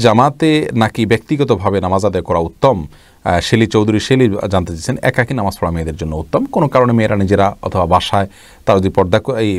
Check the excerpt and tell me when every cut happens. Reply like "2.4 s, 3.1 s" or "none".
none